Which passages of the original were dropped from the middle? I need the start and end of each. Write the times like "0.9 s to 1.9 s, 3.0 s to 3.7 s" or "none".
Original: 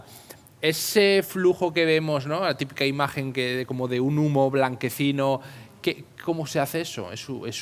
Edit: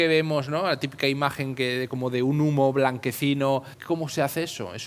5.5 s to 6.1 s